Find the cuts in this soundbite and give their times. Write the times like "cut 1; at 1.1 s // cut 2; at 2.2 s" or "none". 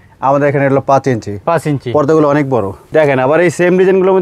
cut 1; at 2.8 s